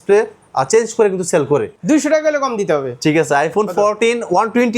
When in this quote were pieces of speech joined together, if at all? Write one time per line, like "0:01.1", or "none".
0:01.7